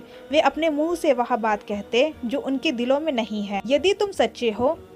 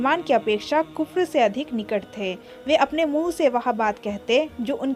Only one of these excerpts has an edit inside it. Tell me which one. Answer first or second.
first